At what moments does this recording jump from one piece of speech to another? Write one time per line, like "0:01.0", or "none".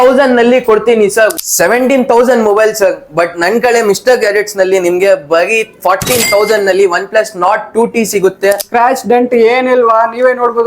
0:01.4
0:08.7

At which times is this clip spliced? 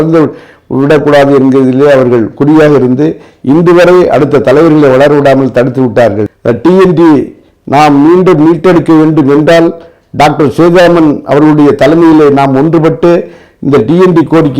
0:06.4

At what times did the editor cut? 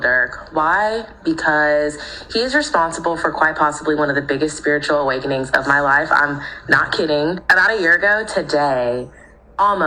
0:05.2

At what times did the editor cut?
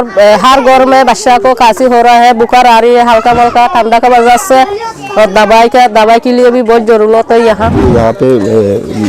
0:07.8

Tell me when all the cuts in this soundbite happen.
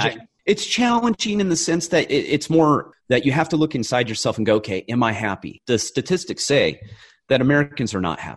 0:02.9

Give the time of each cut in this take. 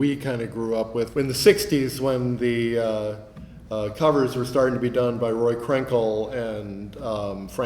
0:01.1

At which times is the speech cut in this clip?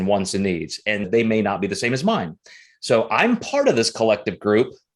0:01.1

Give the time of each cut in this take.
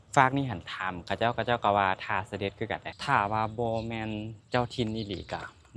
0:02.9

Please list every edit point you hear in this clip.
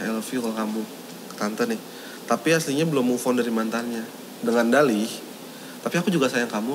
none

